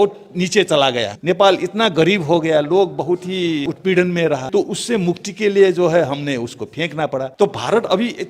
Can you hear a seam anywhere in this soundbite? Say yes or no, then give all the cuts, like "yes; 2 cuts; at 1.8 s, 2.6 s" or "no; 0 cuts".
yes; 4 cuts; at 1.1 s, 3.6 s, 4.4 s, 7.3 s